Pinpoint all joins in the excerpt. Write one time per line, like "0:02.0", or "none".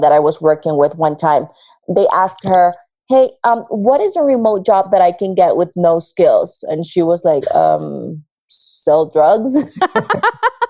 none